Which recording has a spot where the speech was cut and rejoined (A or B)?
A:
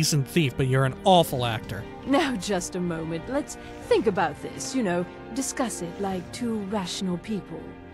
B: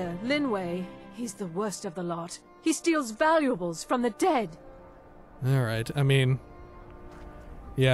A